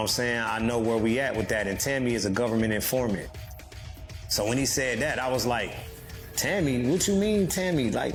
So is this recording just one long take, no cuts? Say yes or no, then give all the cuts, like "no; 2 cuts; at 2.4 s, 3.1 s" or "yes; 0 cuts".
yes; 0 cuts